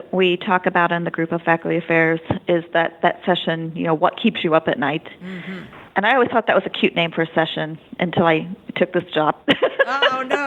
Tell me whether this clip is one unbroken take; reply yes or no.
yes